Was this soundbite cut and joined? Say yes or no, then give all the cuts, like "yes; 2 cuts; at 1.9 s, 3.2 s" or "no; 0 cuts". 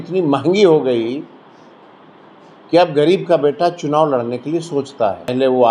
no; 0 cuts